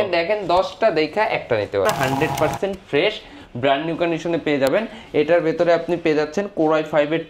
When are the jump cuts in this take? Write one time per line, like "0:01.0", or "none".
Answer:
0:01.9

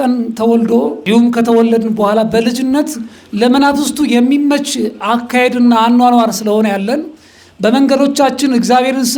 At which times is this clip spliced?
0:01.0

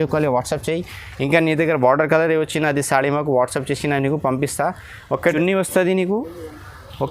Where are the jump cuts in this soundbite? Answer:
0:05.3

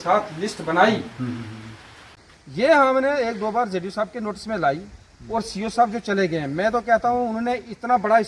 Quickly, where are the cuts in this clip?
0:02.2

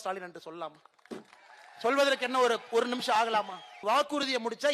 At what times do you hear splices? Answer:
0:03.8

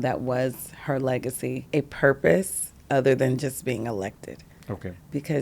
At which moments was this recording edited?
0:01.6

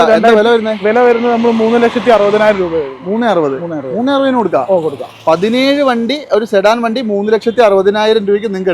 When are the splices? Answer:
none

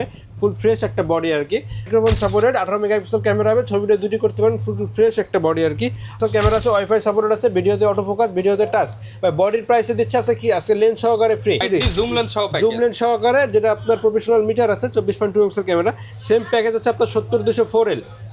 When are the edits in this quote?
0:01.9
0:06.2
0:11.7

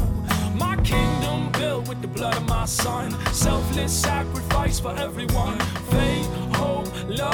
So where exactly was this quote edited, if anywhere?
none

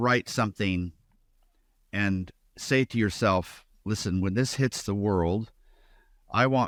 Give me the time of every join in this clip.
none

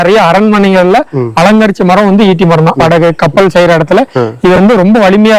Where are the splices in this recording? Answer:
0:02.8

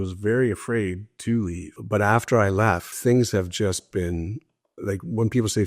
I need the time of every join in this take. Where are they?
0:01.7
0:02.9

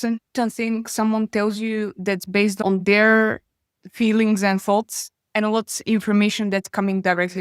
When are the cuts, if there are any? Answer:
none

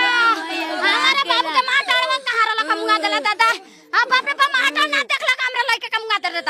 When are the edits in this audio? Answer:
none

